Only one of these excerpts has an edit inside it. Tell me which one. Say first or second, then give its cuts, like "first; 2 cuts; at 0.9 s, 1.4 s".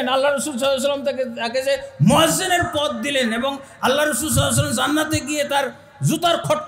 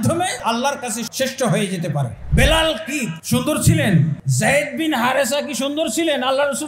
second; 4 cuts; at 0.8 s, 2.2 s, 3.1 s, 4.2 s